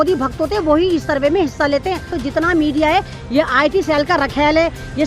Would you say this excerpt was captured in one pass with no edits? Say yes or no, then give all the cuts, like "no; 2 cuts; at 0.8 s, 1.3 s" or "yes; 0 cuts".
no; 1 cut; at 2.1 s